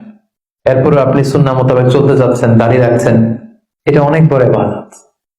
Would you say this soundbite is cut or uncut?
uncut